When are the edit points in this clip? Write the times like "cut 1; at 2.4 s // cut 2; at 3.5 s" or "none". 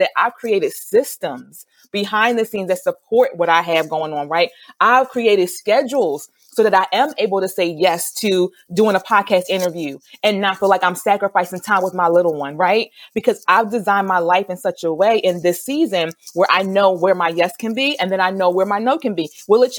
none